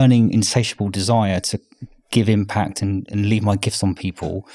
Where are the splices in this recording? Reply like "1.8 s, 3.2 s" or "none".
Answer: none